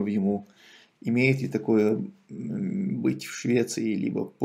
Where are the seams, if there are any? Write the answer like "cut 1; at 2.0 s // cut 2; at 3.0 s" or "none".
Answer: none